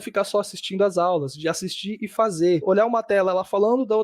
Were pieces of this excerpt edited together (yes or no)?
yes